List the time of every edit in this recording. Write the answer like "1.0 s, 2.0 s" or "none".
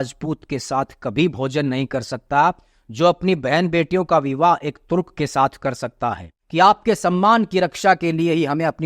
6.3 s

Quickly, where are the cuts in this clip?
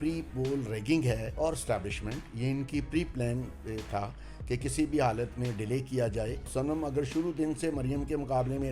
1.3 s, 6.5 s

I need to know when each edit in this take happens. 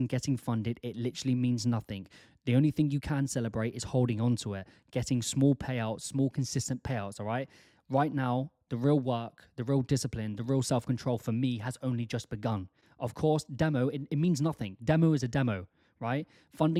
none

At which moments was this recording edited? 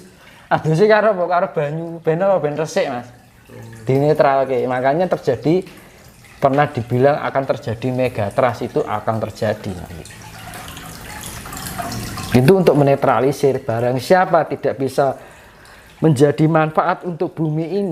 none

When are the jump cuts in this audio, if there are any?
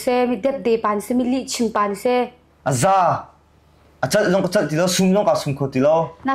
2.5 s

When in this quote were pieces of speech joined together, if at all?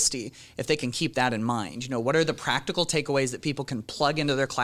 none

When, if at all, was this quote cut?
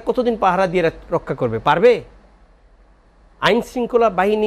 none

